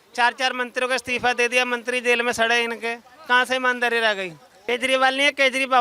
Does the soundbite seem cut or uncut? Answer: cut